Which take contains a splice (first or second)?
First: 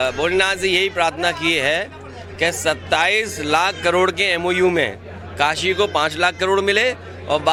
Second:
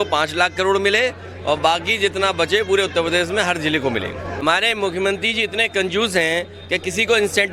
second